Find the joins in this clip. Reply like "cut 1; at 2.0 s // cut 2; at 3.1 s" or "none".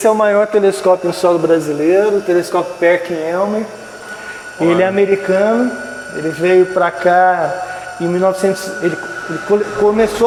none